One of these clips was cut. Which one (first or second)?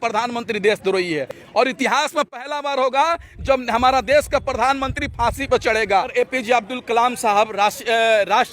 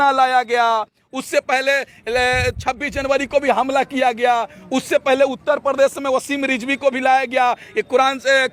first